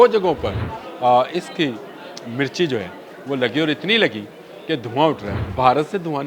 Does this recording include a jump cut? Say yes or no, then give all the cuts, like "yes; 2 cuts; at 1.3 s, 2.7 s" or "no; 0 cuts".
yes; 1 cut; at 5.3 s